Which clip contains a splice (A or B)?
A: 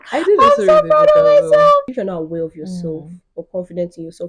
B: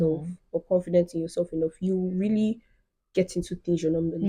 A